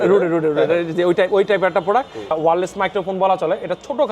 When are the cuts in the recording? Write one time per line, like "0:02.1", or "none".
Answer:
0:02.3